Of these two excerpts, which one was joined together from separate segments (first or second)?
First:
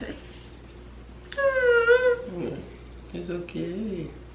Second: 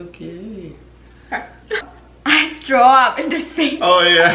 second